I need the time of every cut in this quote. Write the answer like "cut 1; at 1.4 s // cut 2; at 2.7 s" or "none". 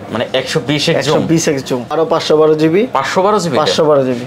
cut 1; at 1.9 s